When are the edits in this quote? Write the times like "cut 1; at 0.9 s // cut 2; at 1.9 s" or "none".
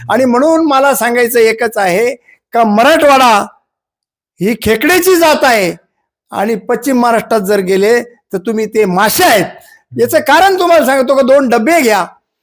none